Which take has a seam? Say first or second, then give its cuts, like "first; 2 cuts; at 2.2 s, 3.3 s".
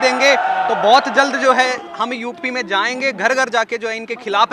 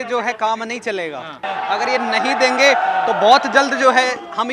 second; 1 cut; at 1.4 s